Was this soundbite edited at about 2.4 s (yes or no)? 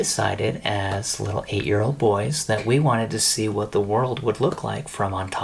no